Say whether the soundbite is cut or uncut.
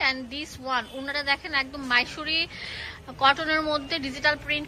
uncut